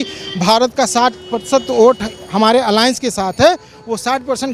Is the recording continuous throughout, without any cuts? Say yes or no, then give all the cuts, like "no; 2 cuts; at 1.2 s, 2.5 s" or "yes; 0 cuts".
yes; 0 cuts